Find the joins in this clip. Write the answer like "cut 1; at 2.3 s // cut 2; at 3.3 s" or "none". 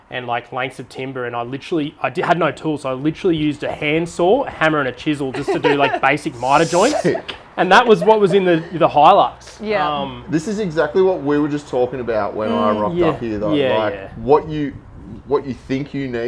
none